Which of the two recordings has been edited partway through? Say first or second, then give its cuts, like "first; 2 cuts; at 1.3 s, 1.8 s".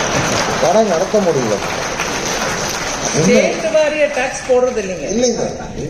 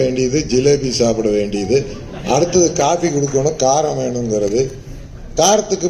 first; 1 cut; at 3.1 s